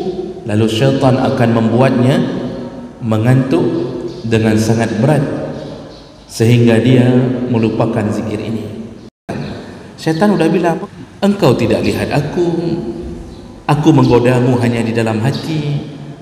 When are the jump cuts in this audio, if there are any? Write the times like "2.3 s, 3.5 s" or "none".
9.3 s, 10.8 s